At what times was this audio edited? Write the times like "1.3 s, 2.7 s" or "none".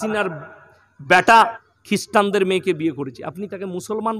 1.7 s